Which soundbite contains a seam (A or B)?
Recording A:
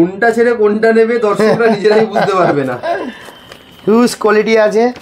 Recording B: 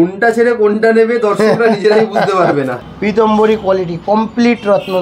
B